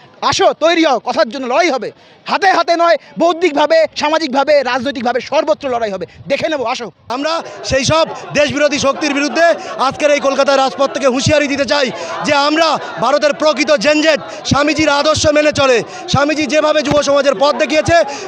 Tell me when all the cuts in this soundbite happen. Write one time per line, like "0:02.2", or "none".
0:07.0